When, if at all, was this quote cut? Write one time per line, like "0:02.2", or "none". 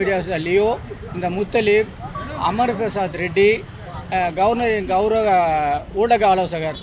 none